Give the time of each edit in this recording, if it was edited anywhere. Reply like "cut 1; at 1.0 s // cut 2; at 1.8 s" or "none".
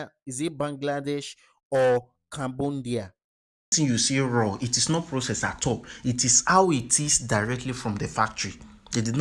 cut 1; at 3.7 s